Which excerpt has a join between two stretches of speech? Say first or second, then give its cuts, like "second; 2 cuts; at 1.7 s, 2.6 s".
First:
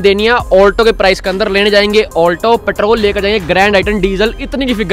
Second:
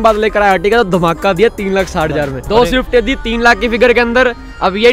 second; 1 cut; at 2.4 s